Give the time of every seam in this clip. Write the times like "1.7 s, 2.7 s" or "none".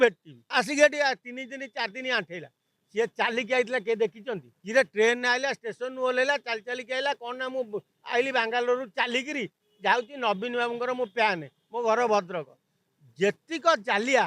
none